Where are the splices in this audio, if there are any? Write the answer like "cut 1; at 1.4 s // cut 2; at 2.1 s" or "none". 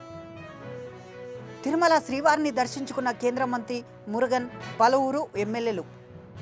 cut 1; at 1.0 s

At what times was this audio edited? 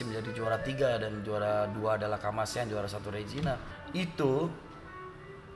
cut 1; at 3.7 s

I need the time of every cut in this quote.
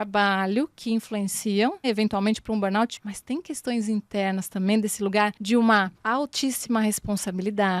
cut 1; at 1.9 s // cut 2; at 2.9 s // cut 3; at 5.4 s // cut 4; at 6.0 s

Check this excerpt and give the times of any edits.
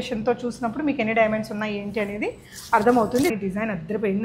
cut 1; at 3.3 s

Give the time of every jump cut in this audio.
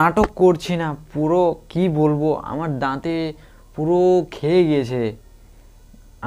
none

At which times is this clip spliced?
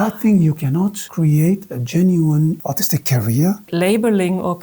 cut 1; at 1.0 s // cut 2; at 2.6 s // cut 3; at 3.7 s

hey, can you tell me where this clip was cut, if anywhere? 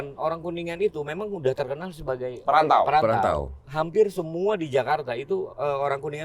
cut 1; at 2.4 s // cut 2; at 3.6 s

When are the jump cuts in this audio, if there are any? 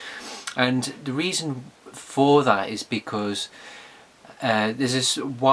cut 1; at 4.6 s

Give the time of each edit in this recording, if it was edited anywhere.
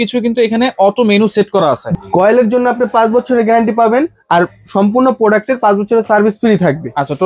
cut 1; at 1.9 s

